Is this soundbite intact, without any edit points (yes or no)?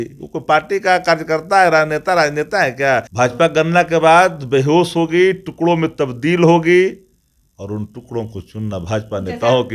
no